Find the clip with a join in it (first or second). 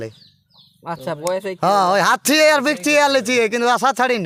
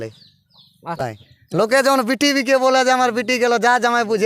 second